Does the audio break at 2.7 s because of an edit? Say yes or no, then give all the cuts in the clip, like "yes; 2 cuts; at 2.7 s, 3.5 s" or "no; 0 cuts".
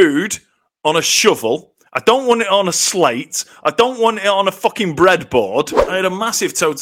no; 1 cut; at 5.8 s